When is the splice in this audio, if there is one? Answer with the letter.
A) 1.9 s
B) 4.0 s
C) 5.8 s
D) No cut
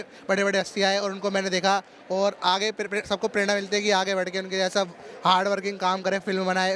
D